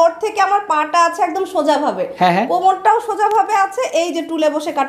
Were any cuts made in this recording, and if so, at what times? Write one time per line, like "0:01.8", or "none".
none